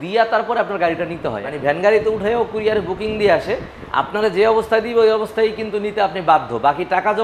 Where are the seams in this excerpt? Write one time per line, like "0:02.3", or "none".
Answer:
0:01.5